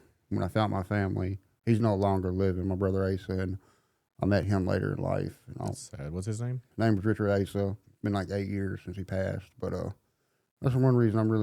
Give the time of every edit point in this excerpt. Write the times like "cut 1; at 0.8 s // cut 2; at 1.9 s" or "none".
cut 1; at 6.6 s // cut 2; at 7.9 s